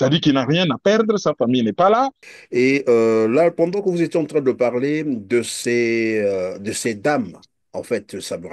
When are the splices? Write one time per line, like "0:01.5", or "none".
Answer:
0:02.4